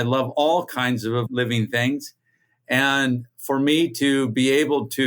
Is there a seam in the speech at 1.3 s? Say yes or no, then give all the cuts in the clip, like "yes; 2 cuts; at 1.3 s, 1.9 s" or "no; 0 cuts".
yes; 1 cut; at 1.3 s